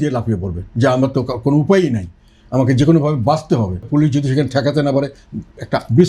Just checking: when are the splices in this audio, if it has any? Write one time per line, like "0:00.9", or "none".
0:03.8